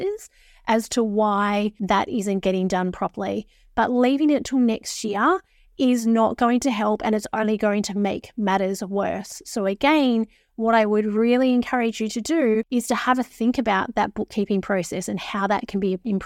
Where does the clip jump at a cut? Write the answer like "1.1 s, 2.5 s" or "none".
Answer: 1.8 s, 12.7 s